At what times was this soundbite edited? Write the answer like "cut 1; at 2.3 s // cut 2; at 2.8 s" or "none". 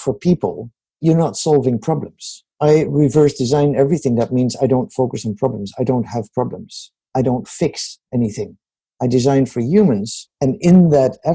cut 1; at 1.0 s // cut 2; at 2.5 s